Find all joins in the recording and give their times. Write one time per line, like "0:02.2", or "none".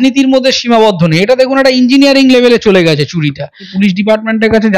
0:03.7